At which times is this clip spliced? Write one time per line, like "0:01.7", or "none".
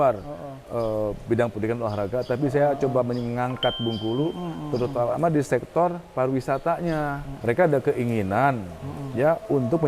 0:07.3